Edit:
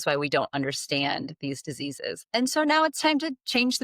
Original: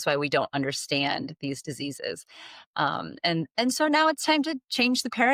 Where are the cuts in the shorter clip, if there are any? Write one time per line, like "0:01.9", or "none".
0:02.3